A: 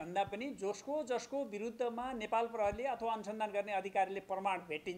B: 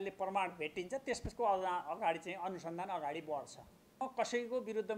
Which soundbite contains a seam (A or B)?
B